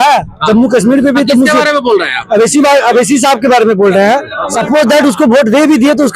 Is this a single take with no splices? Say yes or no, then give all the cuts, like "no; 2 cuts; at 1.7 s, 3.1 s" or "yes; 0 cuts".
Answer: no; 1 cut; at 4.5 s